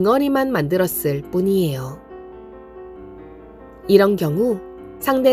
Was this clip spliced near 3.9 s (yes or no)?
yes